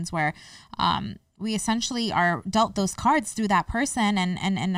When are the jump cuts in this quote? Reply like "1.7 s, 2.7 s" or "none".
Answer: none